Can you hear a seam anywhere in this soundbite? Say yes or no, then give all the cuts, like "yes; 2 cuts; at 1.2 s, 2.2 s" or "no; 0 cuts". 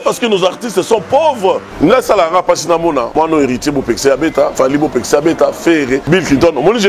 yes; 4 cuts; at 1.7 s, 3.1 s, 4.5 s, 6.0 s